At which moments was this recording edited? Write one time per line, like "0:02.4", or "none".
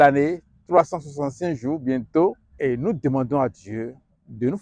0:02.5